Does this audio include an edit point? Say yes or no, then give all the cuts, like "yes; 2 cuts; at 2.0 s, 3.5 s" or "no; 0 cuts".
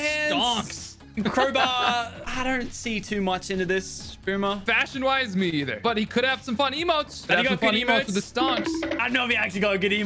no; 0 cuts